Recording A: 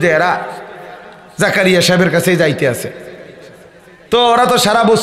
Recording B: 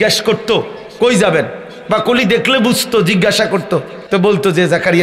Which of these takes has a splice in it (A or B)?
B